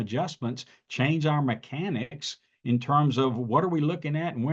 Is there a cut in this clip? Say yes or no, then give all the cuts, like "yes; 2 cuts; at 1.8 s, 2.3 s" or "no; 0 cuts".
no; 0 cuts